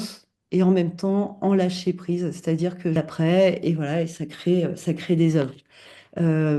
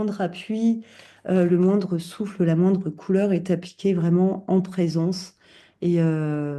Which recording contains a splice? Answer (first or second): first